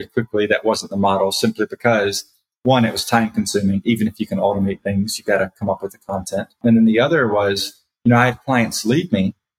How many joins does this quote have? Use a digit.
1